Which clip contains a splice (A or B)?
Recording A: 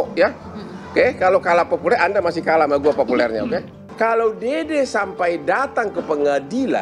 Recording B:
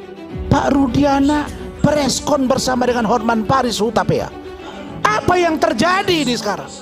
A